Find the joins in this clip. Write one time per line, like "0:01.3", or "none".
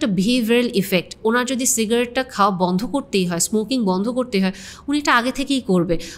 none